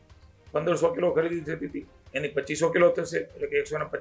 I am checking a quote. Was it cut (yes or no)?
no